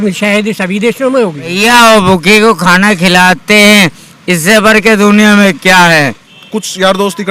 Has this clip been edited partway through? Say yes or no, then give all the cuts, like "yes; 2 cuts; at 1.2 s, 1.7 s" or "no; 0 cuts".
yes; 2 cuts; at 1.6 s, 6.3 s